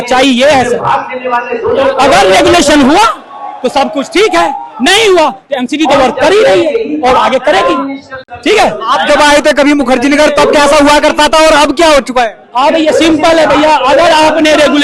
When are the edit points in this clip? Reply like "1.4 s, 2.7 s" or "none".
none